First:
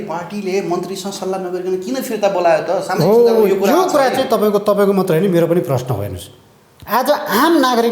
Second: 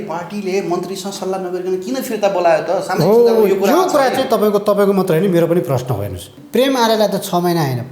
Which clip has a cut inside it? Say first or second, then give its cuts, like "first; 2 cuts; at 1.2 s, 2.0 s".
second; 1 cut; at 6.4 s